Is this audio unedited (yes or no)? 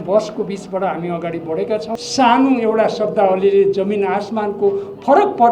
no